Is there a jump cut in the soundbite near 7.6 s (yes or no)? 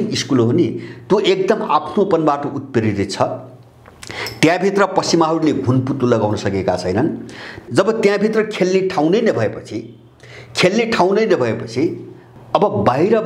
yes